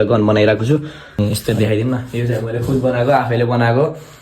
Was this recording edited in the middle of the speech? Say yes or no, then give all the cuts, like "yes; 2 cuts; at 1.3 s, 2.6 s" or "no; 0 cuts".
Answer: yes; 1 cut; at 1.2 s